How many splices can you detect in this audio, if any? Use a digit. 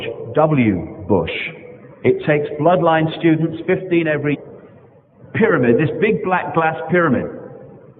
0